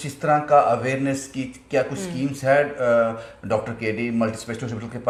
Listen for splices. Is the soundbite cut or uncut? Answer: uncut